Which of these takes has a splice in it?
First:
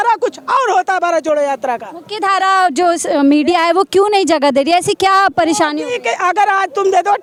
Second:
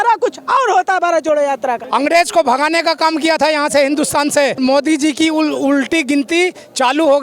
second; 2 cuts; at 1.8 s, 4.6 s

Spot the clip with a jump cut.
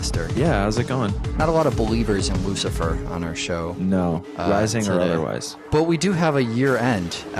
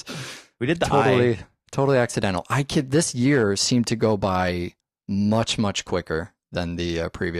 second; 1 cut; at 6.0 s

